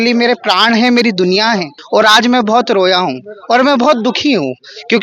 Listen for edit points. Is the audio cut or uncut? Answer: cut